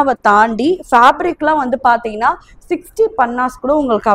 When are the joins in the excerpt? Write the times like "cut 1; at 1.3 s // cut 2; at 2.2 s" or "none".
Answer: none